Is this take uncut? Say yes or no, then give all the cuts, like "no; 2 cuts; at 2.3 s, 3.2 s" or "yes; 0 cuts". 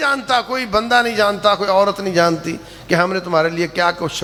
yes; 0 cuts